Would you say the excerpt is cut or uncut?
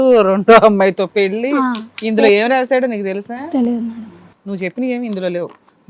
uncut